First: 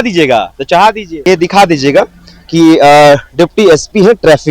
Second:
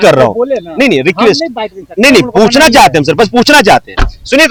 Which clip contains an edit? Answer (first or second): first